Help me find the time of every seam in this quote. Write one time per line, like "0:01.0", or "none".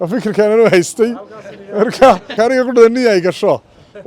0:02.3